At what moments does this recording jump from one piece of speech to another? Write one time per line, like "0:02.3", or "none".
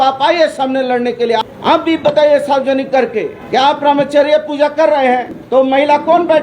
0:01.4
0:03.4
0:05.3